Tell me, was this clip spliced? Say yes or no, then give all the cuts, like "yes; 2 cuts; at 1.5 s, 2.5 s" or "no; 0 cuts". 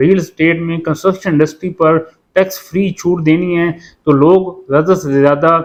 no; 0 cuts